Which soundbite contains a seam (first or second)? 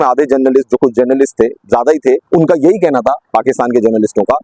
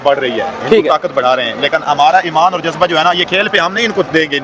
first